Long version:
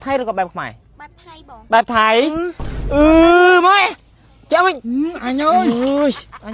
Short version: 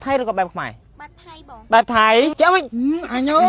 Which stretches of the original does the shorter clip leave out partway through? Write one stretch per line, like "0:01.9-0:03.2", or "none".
0:02.3-0:04.4